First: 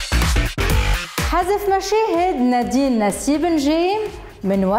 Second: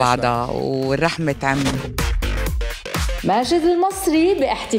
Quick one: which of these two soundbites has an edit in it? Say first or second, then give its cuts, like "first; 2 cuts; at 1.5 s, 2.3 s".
first; 1 cut; at 1.1 s